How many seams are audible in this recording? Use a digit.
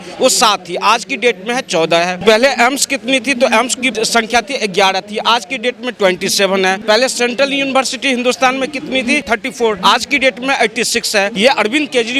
5